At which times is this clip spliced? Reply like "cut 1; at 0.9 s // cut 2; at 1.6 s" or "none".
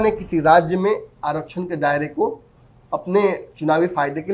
none